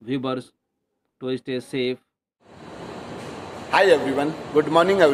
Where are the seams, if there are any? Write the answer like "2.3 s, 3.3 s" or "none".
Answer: 2.3 s